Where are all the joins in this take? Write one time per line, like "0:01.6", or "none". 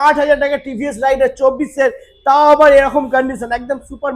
none

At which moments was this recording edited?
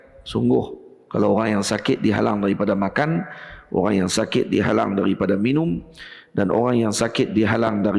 none

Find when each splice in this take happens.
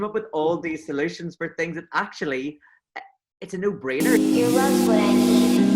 0:04.0

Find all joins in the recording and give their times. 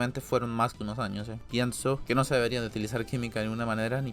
0:01.4

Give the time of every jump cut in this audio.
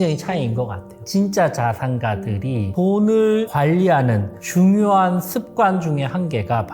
0:01.1
0:02.7
0:03.5

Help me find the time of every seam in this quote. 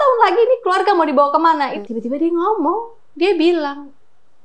0:01.8

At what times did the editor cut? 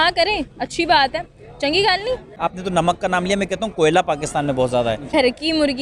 0:02.3
0:05.1

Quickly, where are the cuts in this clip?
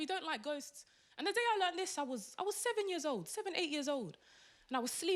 none

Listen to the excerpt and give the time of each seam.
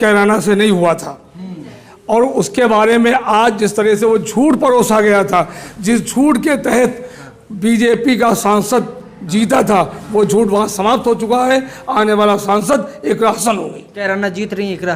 0:13.8

